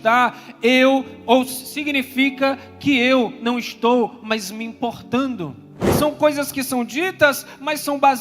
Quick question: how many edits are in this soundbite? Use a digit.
1